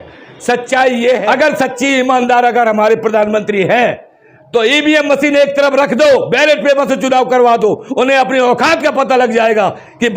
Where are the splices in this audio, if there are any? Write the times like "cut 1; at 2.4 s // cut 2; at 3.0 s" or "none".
cut 1; at 1.2 s